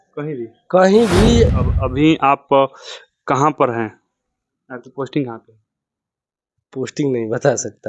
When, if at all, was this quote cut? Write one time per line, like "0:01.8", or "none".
0:01.6